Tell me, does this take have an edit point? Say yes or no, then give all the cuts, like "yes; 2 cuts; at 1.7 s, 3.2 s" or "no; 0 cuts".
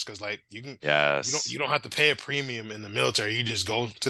no; 0 cuts